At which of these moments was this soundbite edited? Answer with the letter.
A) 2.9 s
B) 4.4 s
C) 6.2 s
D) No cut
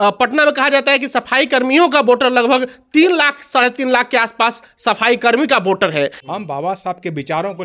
C